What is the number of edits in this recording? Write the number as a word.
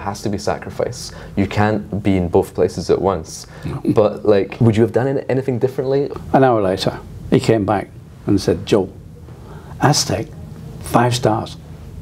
two